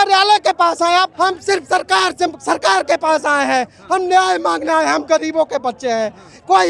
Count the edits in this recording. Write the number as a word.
one